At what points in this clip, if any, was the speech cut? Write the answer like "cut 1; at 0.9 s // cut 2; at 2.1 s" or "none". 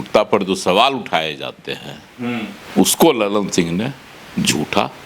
none

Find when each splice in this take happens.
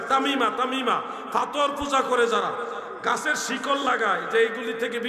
none

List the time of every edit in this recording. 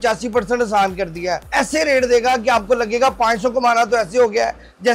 cut 1; at 1.4 s

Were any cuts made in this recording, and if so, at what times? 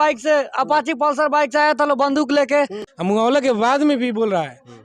cut 1; at 2.9 s

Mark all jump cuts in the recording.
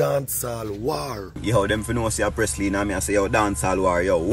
cut 1; at 1.4 s

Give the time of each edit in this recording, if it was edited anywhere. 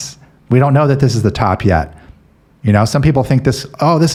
none

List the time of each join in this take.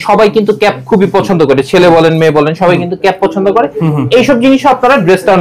none

